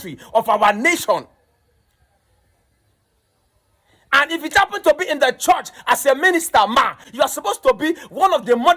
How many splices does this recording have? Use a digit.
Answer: 1